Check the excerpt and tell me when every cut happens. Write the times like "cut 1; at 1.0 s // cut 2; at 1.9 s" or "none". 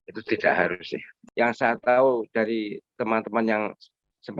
cut 1; at 1.2 s